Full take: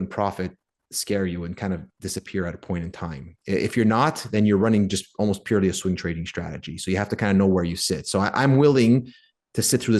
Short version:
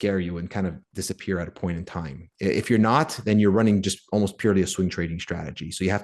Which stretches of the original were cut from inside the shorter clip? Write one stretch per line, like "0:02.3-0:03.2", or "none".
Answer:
none